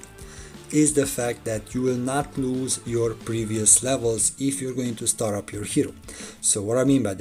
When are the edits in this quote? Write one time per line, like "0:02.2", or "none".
none